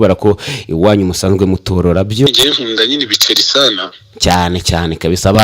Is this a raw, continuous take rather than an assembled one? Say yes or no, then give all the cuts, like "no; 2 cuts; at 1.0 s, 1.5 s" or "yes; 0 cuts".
no; 1 cut; at 2.3 s